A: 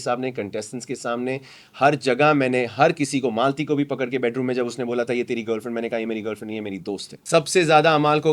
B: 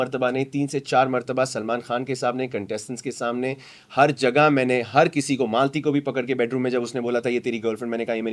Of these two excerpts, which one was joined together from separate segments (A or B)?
A